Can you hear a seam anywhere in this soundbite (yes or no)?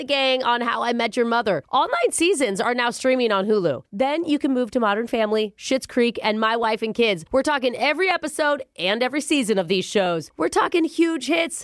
no